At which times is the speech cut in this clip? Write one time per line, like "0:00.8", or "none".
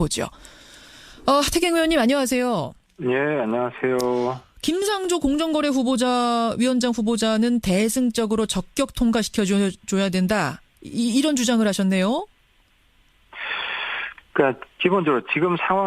0:10.2